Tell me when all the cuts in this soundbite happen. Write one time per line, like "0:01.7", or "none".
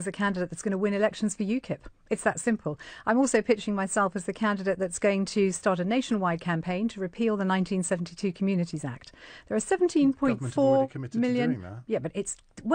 none